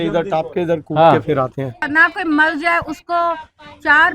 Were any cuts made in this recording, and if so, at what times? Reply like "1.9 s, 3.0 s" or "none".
1.8 s